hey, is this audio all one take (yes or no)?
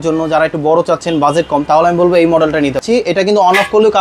no